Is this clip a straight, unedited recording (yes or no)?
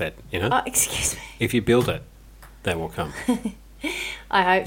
yes